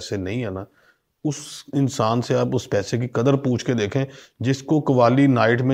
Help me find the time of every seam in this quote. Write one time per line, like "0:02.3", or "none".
none

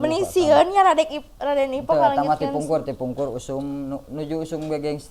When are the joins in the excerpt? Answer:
none

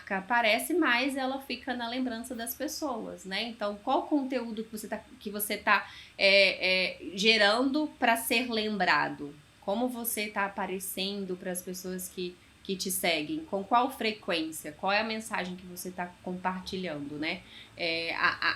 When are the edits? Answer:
none

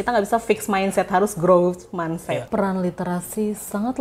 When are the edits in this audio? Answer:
0:02.4

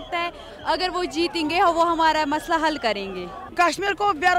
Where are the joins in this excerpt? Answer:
0:03.5

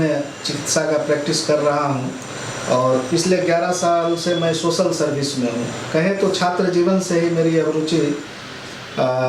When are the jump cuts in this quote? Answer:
none

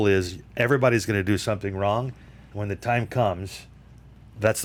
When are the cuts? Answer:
none

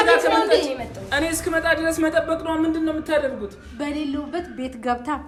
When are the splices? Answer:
none

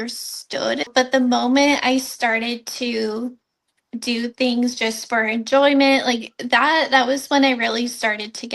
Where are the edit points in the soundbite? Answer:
0:00.9
0:03.9

